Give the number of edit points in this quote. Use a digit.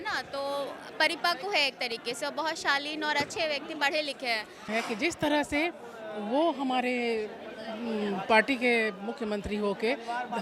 1